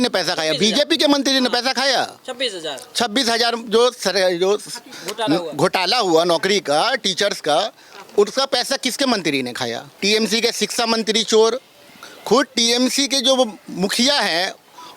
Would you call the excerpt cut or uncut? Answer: cut